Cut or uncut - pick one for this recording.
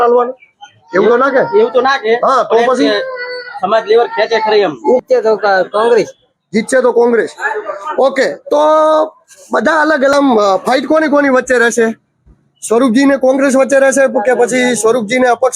cut